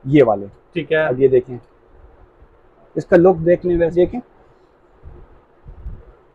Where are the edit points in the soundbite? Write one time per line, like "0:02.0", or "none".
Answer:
0:03.9